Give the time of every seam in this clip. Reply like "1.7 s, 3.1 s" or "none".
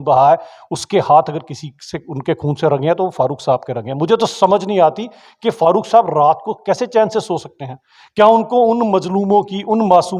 none